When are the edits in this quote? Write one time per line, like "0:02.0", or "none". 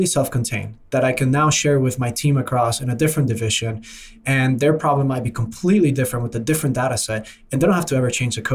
none